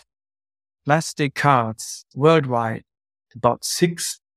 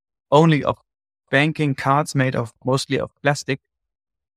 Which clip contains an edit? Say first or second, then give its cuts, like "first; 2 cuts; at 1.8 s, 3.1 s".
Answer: second; 1 cut; at 2.5 s